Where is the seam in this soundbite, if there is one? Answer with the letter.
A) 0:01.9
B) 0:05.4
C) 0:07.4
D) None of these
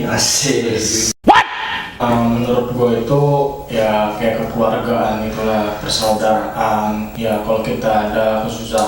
A